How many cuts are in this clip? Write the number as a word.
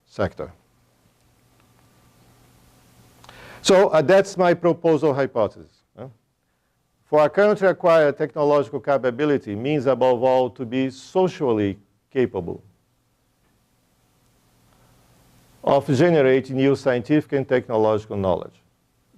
one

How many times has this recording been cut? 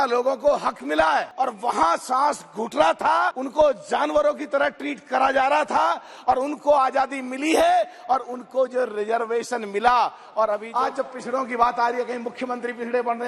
three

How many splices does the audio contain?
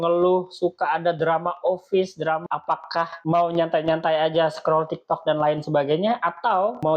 one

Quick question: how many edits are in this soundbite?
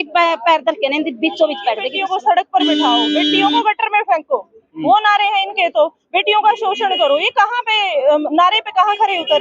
one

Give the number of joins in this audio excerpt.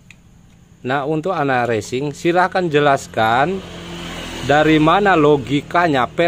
zero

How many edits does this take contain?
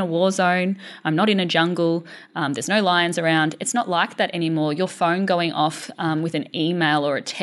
zero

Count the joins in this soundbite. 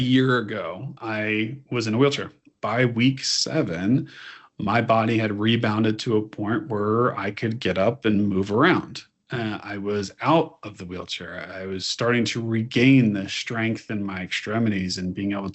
two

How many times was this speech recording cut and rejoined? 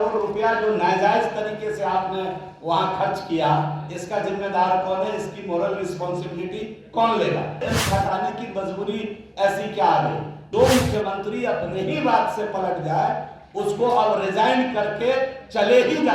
two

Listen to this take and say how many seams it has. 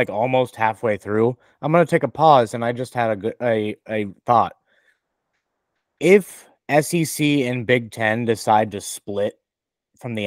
zero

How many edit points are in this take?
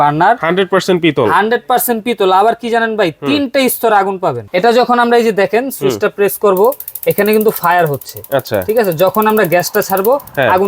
one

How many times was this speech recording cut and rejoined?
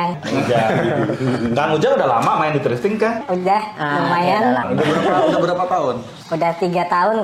zero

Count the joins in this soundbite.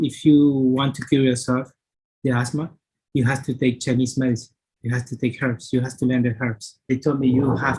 one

